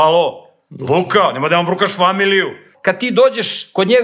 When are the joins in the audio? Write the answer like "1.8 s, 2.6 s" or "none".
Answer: 2.7 s